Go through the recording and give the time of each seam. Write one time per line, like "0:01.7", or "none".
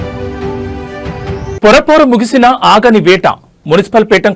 0:01.1